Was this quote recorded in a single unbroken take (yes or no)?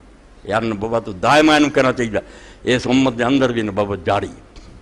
yes